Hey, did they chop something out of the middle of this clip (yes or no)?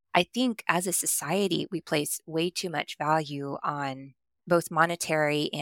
yes